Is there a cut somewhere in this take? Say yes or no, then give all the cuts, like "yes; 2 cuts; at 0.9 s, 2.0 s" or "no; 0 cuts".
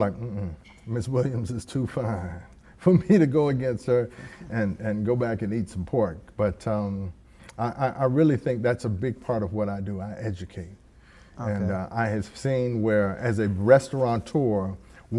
no; 0 cuts